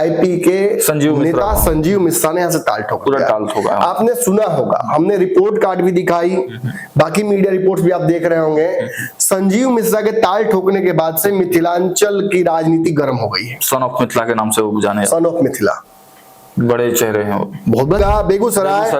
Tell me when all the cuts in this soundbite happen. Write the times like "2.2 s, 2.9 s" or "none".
18.0 s